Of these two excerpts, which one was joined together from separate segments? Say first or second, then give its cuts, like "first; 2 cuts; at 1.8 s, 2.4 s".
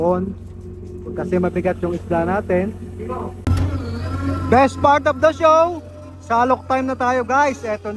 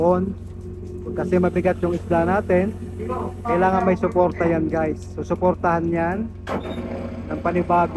first; 1 cut; at 3.3 s